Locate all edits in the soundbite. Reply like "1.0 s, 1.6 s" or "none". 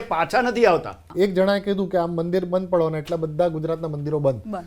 1.1 s